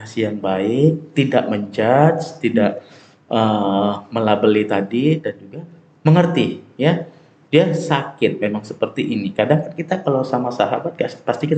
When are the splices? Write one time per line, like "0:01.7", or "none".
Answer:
none